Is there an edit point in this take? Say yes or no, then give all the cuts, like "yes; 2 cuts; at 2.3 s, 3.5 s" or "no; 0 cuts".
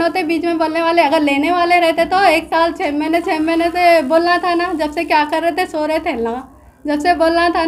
no; 0 cuts